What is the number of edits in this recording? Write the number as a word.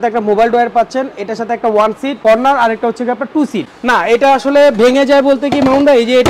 two